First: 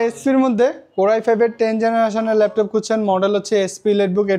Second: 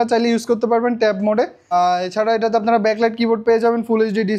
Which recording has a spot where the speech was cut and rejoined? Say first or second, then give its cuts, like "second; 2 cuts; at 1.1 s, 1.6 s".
second; 1 cut; at 1.7 s